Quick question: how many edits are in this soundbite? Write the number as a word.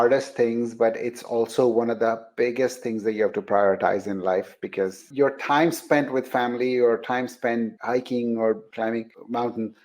one